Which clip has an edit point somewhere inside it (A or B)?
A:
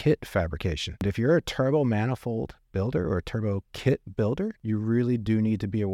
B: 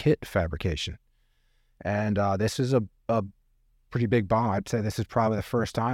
A